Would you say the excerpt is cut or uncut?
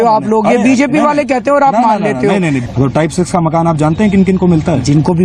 cut